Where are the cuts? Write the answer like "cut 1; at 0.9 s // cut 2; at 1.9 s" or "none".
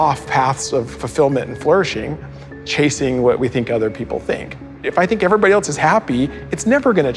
cut 1; at 1.0 s // cut 2; at 4.8 s